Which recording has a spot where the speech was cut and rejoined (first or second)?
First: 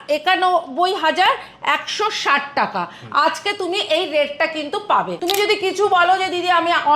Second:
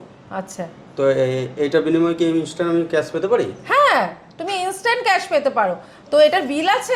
first